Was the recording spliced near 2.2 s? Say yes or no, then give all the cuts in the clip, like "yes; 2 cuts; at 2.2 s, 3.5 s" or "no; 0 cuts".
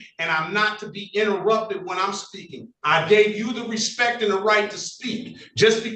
no; 0 cuts